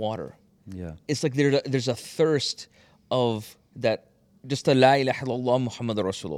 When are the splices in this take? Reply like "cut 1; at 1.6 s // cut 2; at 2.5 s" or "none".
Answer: none